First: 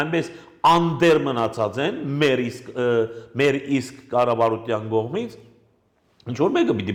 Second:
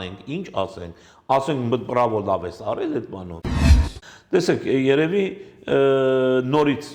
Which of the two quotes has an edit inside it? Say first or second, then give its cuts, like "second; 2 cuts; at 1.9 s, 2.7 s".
second; 1 cut; at 3.6 s